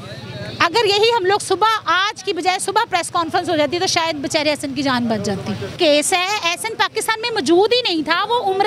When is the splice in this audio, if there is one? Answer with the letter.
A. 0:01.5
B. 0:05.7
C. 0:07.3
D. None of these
B